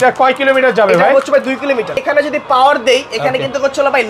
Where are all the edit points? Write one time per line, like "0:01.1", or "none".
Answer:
0:02.0